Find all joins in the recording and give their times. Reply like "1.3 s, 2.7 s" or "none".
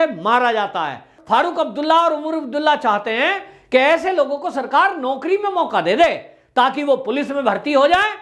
1.1 s

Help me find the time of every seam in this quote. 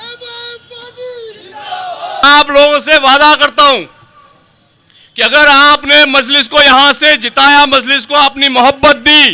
2.2 s

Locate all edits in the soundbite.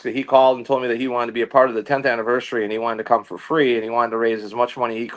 none

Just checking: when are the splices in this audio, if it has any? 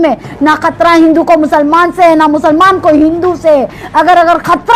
none

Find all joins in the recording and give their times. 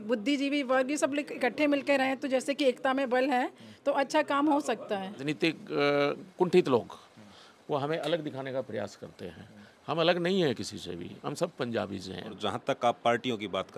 5.2 s, 12.3 s

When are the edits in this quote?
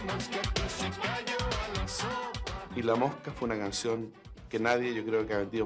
2.6 s

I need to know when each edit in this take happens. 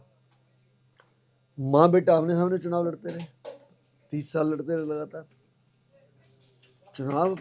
none

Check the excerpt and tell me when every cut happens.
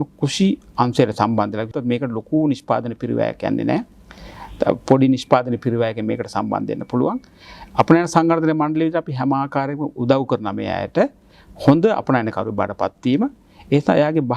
1.7 s

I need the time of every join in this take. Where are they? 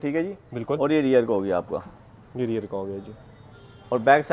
none

